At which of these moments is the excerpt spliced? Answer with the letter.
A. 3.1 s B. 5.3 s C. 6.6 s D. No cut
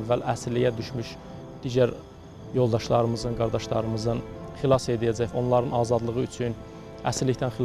B